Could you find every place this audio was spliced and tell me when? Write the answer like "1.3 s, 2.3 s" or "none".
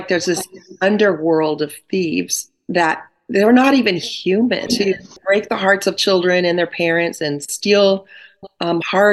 5.1 s